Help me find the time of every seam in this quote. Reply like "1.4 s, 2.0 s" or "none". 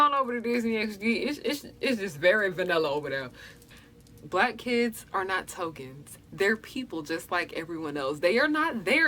3.5 s

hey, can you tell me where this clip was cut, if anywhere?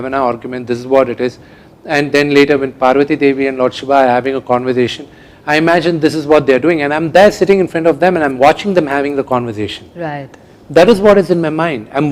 none

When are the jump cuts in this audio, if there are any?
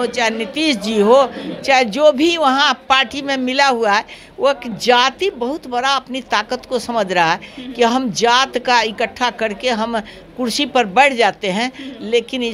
none

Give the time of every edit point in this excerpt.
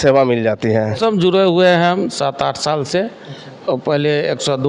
0.9 s

